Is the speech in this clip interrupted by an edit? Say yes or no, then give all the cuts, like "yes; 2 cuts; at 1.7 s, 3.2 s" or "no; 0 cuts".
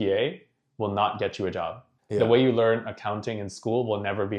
yes; 1 cut; at 1.9 s